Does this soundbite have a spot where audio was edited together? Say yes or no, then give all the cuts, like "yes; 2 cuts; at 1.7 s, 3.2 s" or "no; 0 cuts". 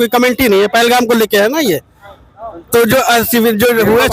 no; 0 cuts